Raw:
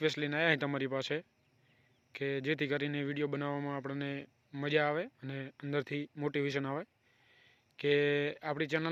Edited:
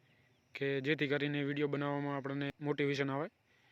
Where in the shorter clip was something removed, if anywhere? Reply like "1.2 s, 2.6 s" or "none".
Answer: 2.6 s